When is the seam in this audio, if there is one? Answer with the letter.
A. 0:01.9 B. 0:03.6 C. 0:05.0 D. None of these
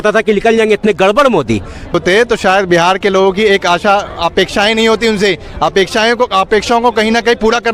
A